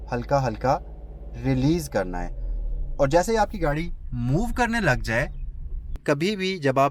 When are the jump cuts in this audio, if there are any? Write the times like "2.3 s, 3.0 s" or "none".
6.0 s